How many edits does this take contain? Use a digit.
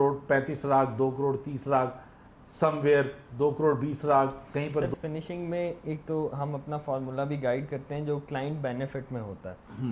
1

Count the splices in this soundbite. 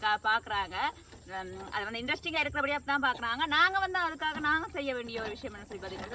0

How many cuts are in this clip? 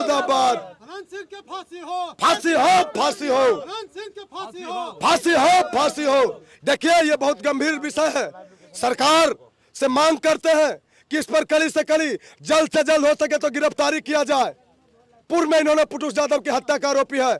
0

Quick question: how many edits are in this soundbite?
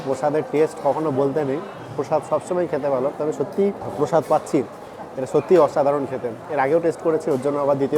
1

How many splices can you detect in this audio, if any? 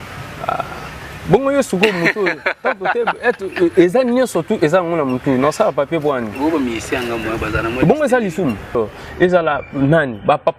1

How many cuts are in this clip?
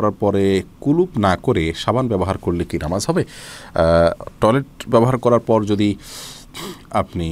0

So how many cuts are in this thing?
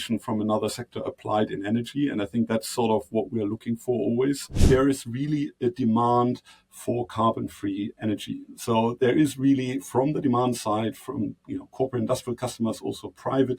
1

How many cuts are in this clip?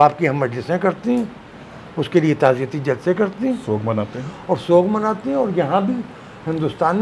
0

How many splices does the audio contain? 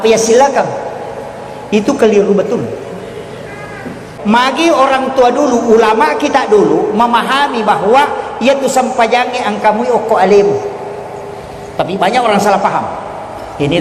1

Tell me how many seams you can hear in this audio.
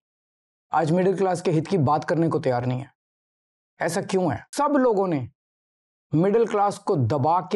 1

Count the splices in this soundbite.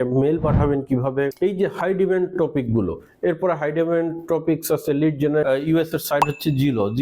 1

